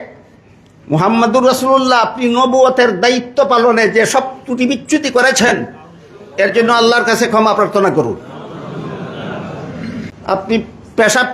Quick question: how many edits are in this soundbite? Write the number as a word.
one